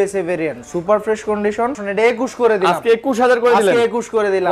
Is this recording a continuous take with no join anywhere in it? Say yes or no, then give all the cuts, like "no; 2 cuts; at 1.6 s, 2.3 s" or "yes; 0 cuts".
no; 1 cut; at 1.8 s